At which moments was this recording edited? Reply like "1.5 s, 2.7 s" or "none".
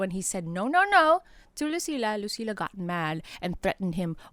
none